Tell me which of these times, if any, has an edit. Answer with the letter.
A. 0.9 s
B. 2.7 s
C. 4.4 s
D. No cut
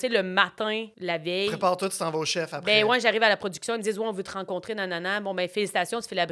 A